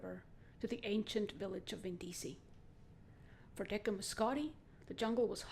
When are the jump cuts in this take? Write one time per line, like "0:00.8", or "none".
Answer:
0:01.5